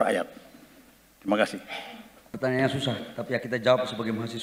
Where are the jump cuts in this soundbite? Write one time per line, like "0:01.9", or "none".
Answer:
0:02.4